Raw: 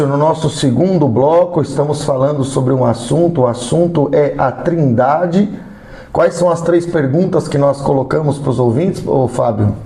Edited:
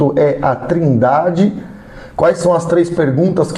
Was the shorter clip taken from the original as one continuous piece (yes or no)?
yes